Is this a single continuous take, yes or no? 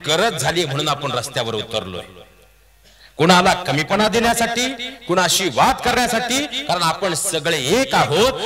yes